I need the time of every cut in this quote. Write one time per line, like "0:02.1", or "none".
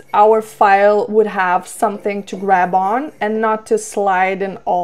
none